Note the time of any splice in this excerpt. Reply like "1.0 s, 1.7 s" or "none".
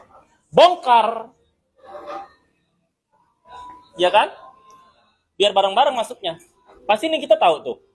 none